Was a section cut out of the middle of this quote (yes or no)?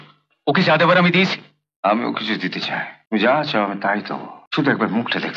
yes